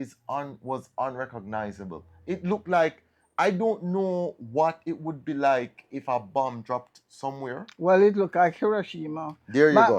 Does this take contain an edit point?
no; 0 cuts

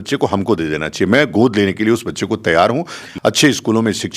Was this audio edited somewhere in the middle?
yes; 1 cut; at 3.0 s

